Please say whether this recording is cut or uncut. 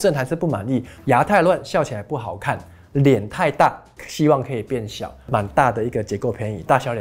cut